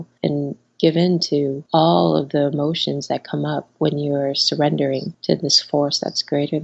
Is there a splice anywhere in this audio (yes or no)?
no